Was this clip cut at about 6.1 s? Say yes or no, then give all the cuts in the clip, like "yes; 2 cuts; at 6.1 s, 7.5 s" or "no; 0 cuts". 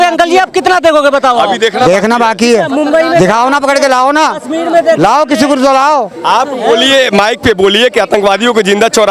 no; 0 cuts